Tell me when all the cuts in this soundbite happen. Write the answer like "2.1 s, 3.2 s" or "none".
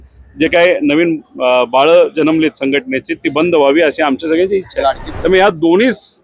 5.1 s